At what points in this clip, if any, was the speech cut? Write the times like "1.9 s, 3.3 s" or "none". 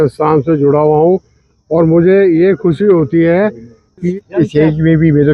4.1 s